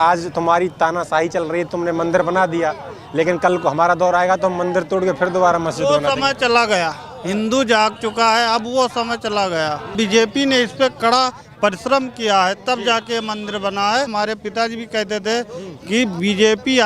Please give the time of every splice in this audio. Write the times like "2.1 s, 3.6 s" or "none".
9.9 s, 14.1 s